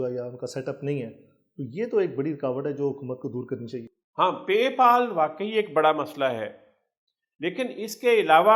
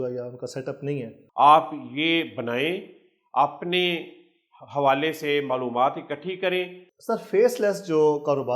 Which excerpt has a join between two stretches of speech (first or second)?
second